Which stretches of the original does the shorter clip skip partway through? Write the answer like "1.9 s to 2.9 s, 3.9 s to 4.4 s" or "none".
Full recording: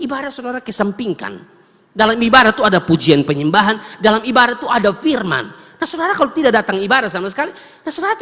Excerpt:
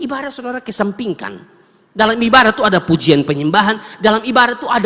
none